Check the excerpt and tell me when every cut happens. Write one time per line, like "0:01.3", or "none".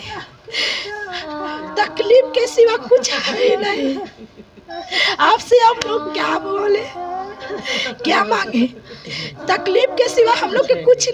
none